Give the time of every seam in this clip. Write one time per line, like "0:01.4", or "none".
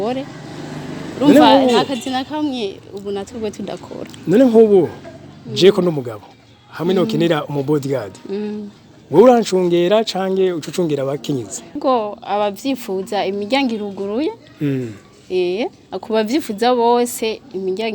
0:11.8